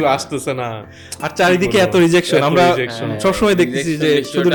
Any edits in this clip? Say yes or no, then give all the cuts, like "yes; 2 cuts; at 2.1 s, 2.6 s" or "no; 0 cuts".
no; 0 cuts